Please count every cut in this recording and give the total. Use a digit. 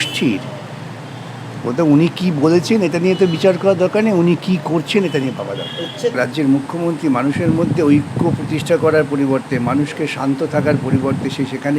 1